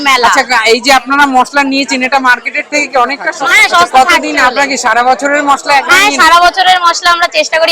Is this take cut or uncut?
cut